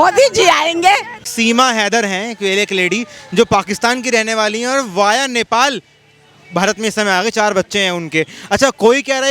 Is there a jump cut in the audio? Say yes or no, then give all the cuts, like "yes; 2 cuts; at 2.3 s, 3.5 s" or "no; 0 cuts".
yes; 1 cut; at 1.2 s